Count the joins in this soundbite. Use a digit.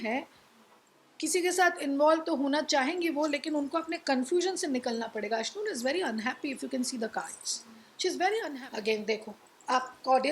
1